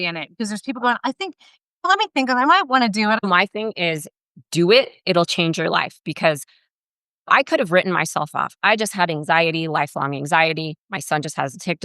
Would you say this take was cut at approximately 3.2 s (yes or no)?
yes